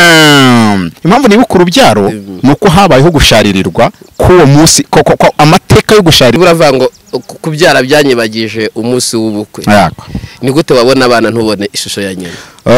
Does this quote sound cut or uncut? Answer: cut